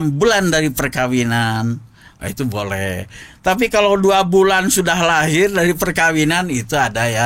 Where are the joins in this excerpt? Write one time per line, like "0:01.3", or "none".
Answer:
none